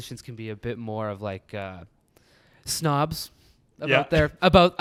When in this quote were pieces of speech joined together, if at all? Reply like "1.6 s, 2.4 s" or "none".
none

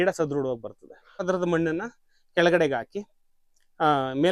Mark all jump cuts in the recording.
1.2 s

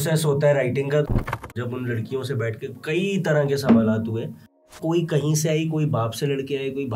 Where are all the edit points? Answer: 1.1 s, 4.8 s

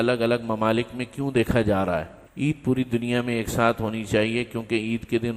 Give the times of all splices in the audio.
2.2 s

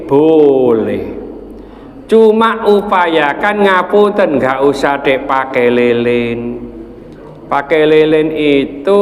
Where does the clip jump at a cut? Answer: none

